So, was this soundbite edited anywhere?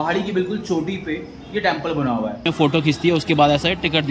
yes; 1 cut; at 2.4 s

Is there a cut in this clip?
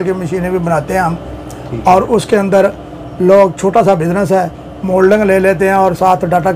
no; 0 cuts

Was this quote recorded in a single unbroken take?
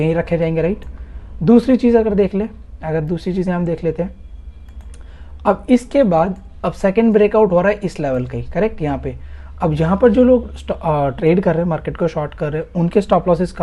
yes; 0 cuts

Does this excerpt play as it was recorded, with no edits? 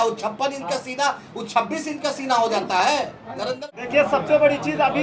no; 1 cut; at 3.6 s

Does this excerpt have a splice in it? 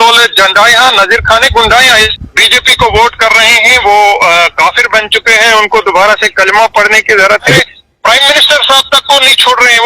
yes; 2 cuts; at 2.1 s, 7.6 s

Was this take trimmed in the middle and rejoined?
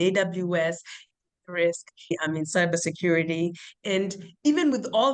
yes; 1 cut; at 2.1 s

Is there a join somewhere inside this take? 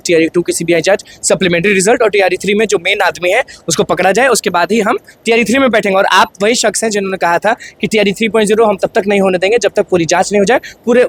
no; 0 cuts

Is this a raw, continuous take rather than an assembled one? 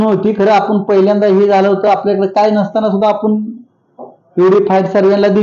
yes; 0 cuts

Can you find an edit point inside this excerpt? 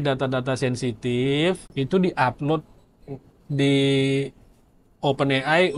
yes; 1 cut; at 1.7 s

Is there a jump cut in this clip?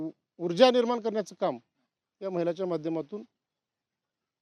no; 0 cuts

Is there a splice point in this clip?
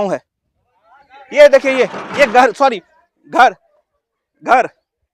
no; 0 cuts

